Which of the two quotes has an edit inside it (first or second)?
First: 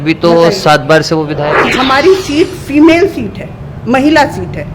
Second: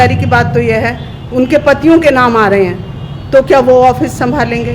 first